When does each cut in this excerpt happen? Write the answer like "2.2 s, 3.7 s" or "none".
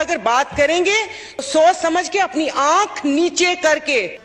1.4 s